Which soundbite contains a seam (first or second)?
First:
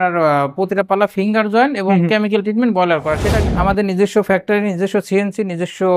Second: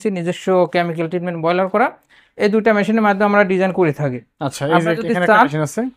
first